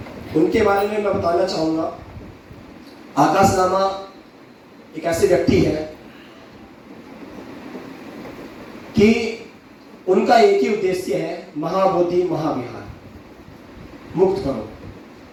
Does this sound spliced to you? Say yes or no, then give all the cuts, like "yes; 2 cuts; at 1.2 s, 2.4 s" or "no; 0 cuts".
no; 0 cuts